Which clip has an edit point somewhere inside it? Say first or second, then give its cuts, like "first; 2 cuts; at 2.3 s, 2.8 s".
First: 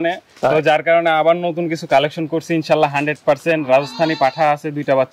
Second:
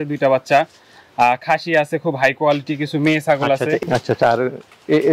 second; 1 cut; at 3.8 s